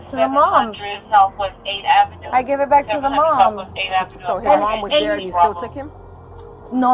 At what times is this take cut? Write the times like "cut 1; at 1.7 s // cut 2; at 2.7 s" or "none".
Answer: none